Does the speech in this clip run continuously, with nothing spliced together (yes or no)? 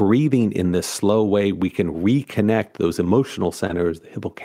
yes